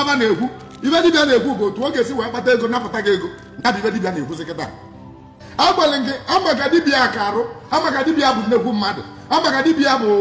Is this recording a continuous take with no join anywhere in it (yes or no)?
no